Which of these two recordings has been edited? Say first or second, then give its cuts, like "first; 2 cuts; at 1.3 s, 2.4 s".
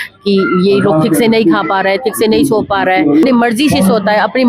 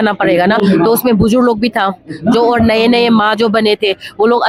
first; 1 cut; at 3.2 s